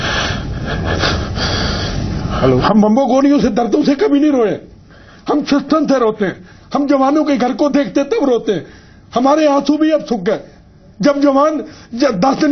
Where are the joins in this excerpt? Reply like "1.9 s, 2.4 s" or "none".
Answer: none